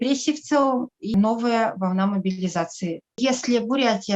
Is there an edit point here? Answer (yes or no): yes